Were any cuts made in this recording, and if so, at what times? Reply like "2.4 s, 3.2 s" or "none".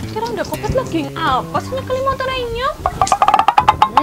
2.8 s